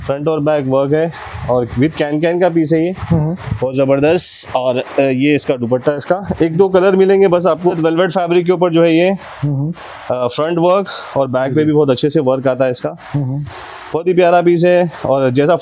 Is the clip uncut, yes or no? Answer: no